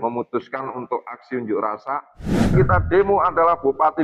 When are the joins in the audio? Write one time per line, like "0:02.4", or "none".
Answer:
0:02.5